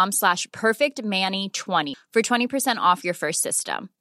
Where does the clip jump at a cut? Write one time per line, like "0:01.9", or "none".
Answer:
0:01.9